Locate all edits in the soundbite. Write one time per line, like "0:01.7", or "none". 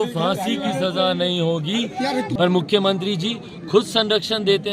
0:02.3